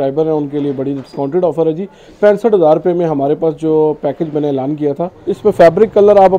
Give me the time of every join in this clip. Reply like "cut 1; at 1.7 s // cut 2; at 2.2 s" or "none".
cut 1; at 5.2 s